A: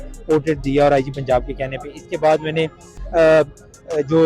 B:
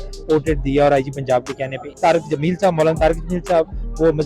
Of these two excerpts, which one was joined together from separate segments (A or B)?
B